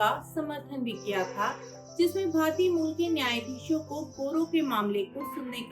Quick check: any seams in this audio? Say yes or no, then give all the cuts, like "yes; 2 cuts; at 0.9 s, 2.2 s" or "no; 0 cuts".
no; 0 cuts